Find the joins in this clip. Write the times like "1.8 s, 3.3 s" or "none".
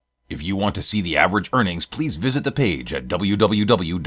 none